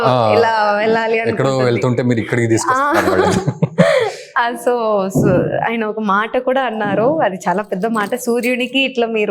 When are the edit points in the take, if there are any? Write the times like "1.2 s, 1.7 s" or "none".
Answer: none